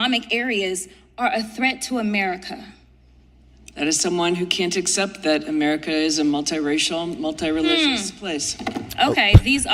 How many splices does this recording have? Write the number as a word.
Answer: zero